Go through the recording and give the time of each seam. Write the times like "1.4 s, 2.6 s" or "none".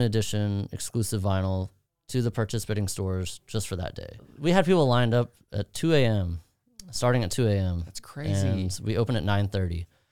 4.3 s